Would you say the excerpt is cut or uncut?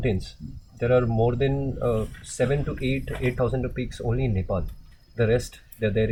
uncut